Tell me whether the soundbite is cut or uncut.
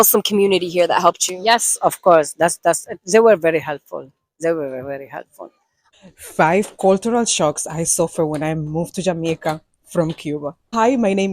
cut